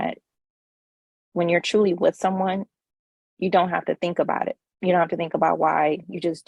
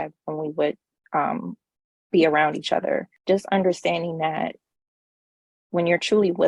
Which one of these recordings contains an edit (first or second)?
second